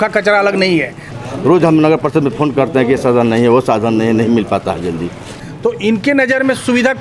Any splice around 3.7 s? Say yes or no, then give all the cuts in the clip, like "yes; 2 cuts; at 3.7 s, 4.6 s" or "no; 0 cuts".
no; 2 cuts; at 1.1 s, 5.3 s